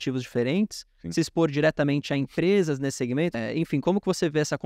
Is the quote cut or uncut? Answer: cut